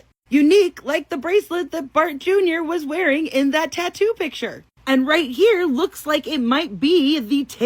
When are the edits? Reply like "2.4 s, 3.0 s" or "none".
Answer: none